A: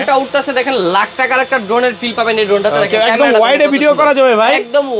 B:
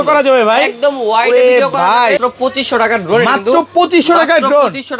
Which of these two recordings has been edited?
B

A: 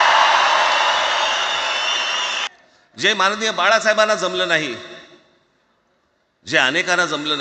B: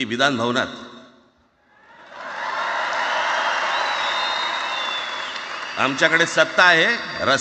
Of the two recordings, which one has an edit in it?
A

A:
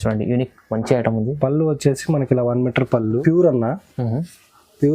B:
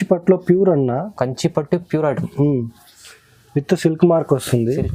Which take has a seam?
A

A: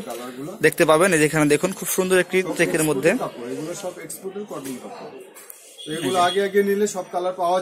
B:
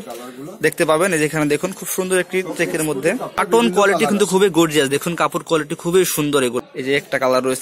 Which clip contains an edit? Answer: B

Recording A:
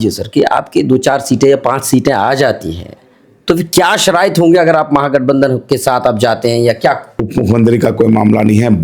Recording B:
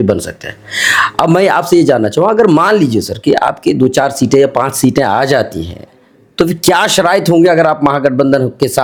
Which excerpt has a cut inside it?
A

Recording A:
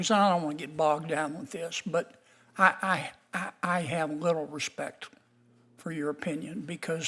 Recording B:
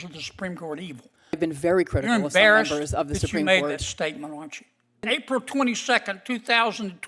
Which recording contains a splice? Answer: B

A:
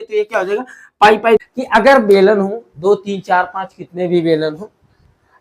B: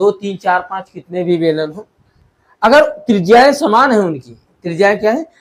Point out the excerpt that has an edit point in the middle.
A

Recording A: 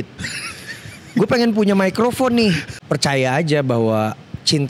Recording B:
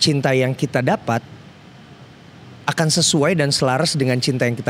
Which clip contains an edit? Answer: A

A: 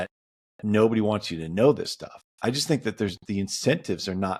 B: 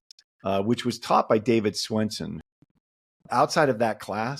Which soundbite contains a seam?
B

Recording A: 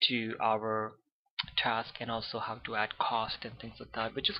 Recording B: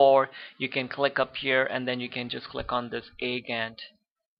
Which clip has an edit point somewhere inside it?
A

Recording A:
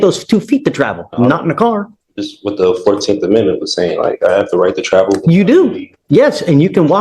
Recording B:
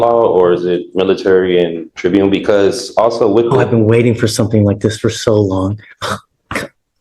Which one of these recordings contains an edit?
B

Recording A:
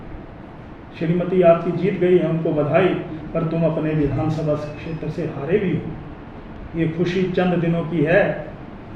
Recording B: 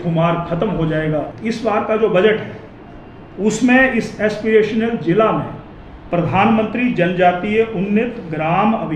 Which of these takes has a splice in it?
B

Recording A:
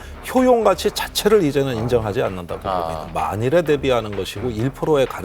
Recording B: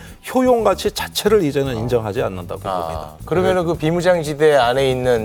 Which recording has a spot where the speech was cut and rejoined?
A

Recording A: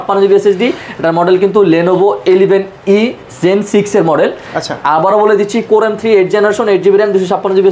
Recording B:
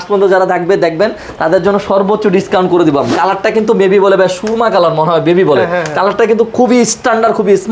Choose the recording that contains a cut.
B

